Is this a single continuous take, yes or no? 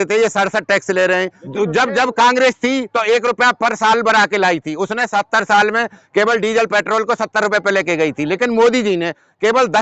no